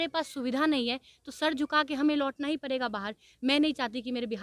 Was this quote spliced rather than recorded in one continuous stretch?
no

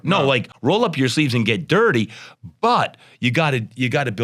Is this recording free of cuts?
yes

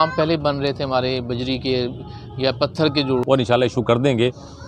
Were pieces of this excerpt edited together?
yes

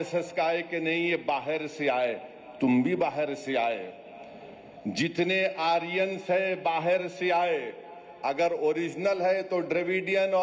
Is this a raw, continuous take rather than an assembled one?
yes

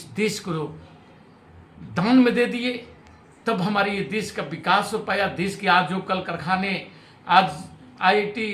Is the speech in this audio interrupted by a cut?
no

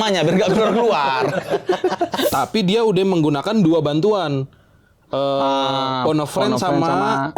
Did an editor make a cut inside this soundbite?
yes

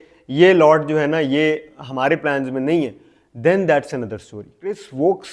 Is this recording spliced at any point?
yes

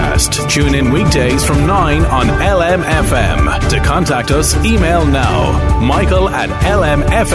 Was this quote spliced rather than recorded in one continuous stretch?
no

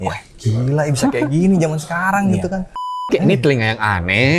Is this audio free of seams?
no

